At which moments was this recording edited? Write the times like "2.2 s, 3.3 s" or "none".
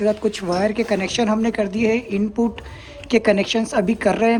none